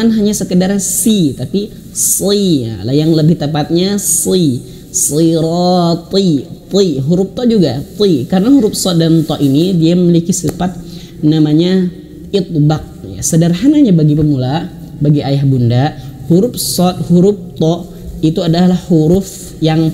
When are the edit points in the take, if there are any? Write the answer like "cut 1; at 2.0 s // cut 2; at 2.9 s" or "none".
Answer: none